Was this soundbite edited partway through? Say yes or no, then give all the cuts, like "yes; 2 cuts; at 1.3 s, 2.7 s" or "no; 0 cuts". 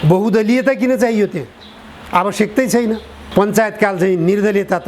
yes; 1 cut; at 3.1 s